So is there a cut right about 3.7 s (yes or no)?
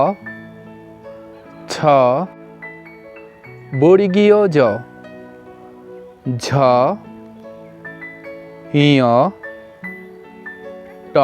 yes